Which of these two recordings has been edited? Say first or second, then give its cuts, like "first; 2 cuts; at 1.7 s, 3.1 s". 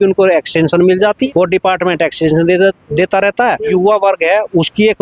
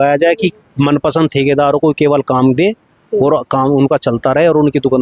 first; 2 cuts; at 1.3 s, 3.7 s